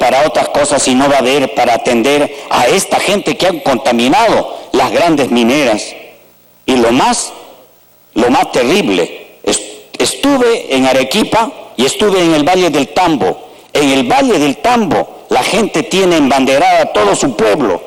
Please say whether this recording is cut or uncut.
uncut